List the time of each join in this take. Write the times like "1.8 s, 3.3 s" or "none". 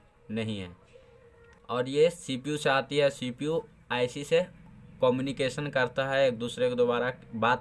1.6 s